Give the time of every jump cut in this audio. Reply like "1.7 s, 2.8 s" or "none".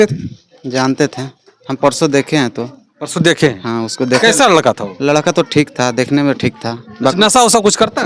none